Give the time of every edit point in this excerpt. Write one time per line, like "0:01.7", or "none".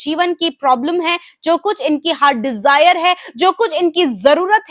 none